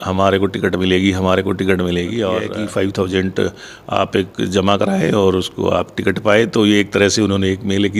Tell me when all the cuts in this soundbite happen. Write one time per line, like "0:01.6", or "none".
0:02.5